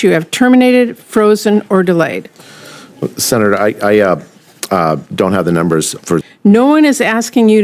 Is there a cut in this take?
yes; 1 cut; at 6.3 s

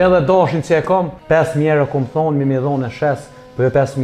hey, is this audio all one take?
no; 1 cut; at 1.2 s

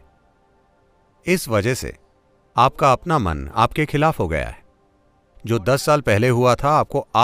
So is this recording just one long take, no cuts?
yes; 0 cuts

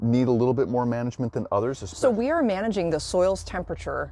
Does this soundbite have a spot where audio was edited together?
yes; 1 cut; at 1.9 s

